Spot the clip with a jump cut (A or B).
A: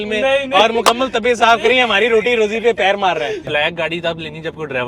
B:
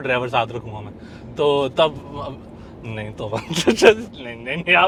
A